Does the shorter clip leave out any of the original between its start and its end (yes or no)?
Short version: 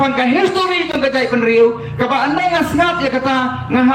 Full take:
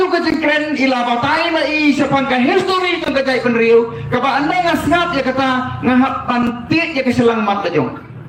no